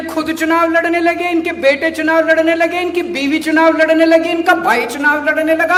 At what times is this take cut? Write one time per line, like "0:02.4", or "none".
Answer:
none